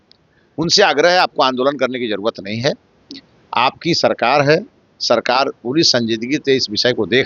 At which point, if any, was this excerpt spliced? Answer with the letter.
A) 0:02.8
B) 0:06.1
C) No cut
C